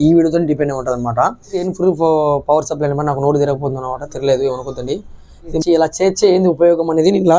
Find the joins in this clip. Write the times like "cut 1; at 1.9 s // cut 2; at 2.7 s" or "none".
cut 1; at 1.7 s // cut 2; at 5.6 s